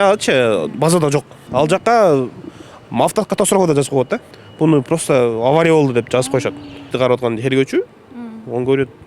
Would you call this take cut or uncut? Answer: cut